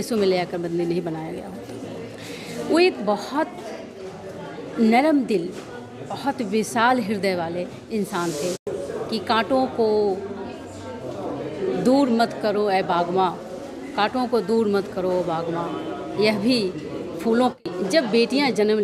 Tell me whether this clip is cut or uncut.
cut